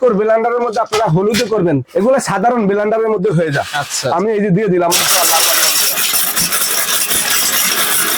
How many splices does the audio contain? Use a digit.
1